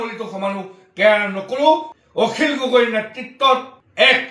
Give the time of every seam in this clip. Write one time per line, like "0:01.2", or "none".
0:02.0